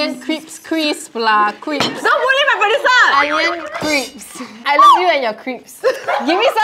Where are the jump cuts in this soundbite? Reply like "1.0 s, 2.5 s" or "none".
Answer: 2.0 s, 4.5 s